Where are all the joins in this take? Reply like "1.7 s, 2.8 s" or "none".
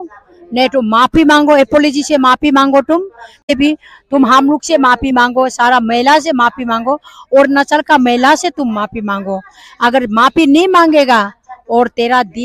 3.4 s